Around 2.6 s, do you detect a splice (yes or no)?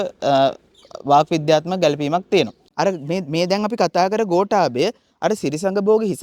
yes